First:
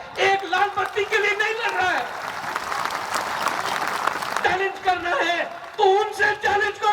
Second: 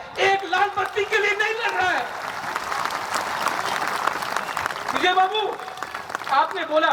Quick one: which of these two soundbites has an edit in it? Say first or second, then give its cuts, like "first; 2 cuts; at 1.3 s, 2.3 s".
first; 1 cut; at 4.3 s